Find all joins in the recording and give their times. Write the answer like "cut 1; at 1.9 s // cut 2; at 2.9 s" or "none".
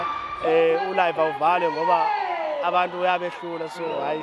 none